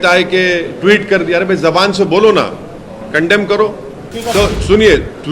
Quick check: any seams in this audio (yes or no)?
yes